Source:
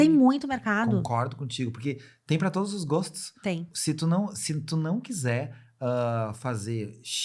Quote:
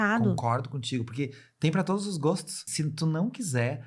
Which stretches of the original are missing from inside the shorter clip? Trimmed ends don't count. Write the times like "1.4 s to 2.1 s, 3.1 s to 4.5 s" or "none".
3.3 s to 4.4 s